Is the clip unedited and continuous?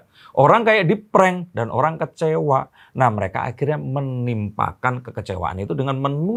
yes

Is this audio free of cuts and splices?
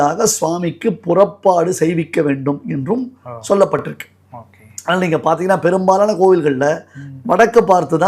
yes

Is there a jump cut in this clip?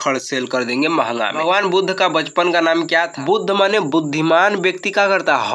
yes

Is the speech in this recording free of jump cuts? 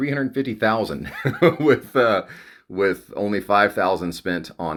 yes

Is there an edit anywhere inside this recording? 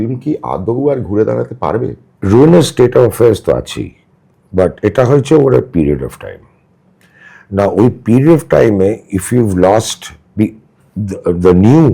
yes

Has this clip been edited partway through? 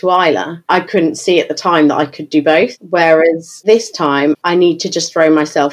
yes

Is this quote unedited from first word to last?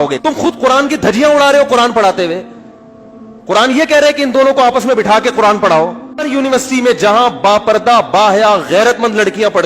no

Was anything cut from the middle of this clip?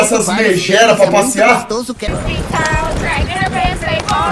yes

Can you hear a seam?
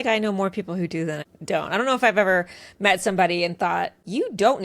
yes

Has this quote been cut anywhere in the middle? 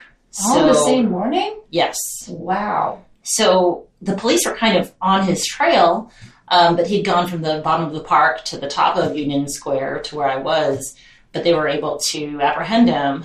yes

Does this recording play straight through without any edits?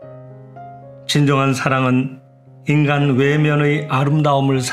no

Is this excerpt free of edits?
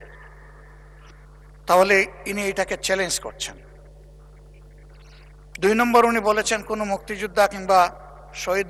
yes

